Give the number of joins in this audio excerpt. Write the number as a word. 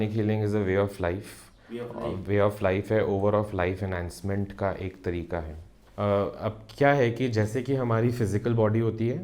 one